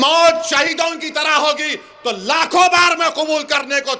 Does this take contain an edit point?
no; 0 cuts

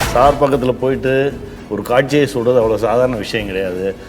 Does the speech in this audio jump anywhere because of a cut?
no; 0 cuts

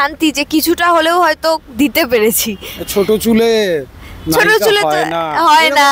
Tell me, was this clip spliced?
no; 0 cuts

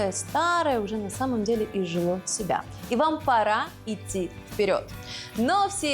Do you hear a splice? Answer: no; 0 cuts

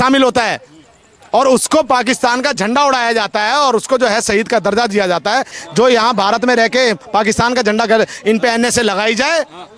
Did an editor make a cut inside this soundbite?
yes; 1 cut; at 5.6 s

